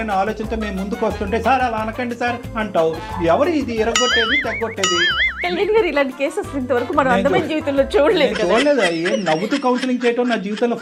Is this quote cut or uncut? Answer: uncut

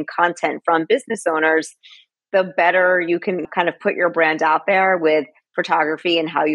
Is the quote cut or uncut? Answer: uncut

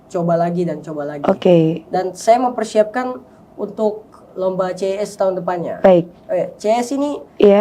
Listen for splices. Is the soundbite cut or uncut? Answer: uncut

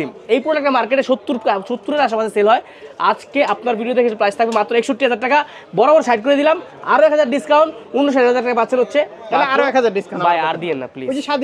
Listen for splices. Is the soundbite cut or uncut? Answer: uncut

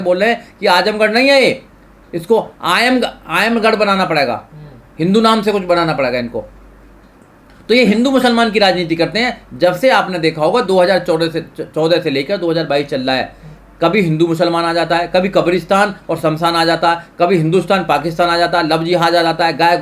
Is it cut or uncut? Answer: uncut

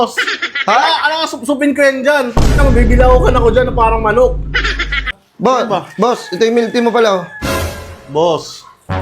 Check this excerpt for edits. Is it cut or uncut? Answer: cut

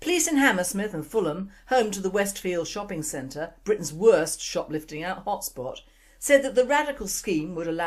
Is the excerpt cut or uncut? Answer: uncut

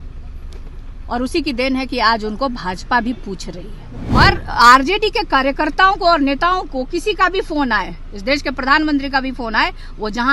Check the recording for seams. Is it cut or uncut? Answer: cut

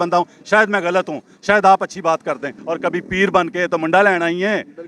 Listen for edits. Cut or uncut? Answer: cut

